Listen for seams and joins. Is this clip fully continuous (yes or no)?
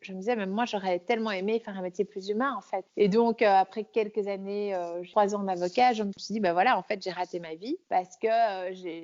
no